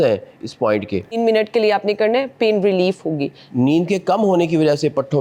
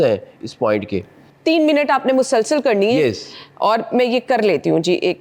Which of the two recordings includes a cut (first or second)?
first